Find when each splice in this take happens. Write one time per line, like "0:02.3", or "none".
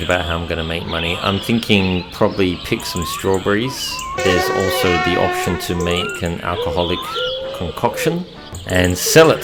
none